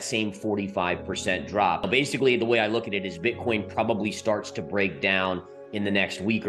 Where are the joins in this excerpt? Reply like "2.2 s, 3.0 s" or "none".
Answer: 1.8 s

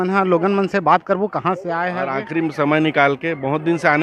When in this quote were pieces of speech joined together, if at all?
2.0 s

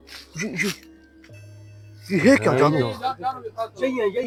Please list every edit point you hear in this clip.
none

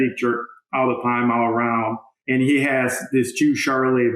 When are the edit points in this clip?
2.1 s

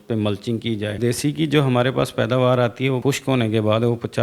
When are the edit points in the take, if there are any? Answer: 1.0 s, 3.0 s

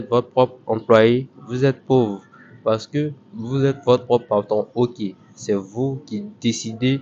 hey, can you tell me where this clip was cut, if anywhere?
none

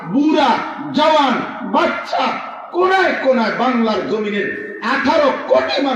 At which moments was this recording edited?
none

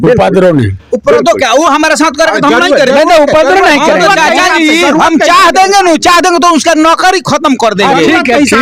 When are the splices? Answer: none

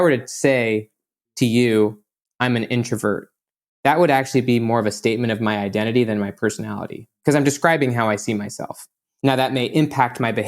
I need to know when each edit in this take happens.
9.1 s

